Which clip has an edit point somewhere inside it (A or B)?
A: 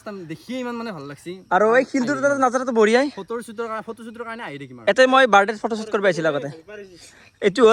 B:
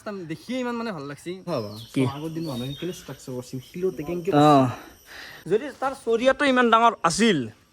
B